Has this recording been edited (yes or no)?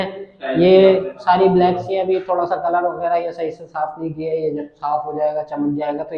no